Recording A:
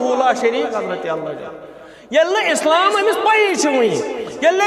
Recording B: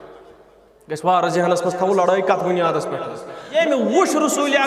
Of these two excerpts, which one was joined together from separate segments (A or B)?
B